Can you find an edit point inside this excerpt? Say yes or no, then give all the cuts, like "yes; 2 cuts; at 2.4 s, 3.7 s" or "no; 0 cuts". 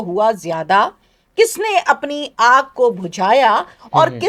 no; 0 cuts